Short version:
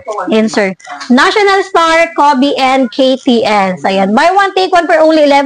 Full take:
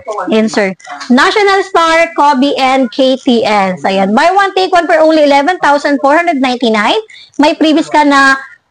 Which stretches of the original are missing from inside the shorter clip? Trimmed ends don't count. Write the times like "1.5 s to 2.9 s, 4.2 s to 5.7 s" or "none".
none